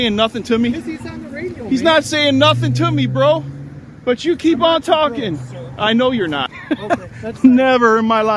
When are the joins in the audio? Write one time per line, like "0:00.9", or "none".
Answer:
0:06.5